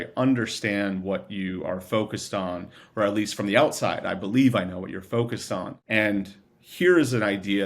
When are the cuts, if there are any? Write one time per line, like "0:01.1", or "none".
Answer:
0:05.8